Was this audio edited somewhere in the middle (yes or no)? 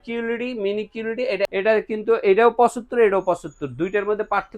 yes